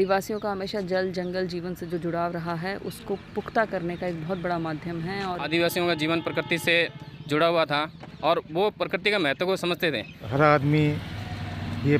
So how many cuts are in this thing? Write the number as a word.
two